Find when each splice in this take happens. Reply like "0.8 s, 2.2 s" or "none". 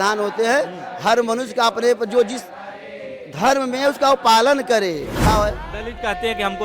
5.2 s